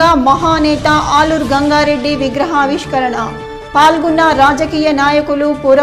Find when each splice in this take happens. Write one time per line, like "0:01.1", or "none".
none